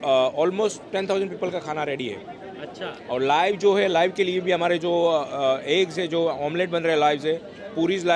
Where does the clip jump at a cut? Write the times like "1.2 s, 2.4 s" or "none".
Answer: none